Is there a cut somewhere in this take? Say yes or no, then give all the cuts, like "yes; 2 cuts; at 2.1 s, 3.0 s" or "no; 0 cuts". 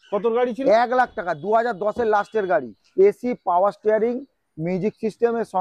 yes; 1 cut; at 2.8 s